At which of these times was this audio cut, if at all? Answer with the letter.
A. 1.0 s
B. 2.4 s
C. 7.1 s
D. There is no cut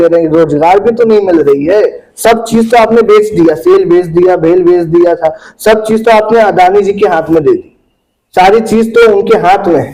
D